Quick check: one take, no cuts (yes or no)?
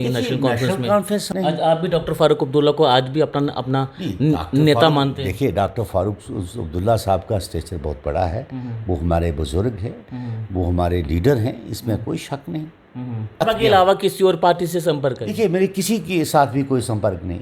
no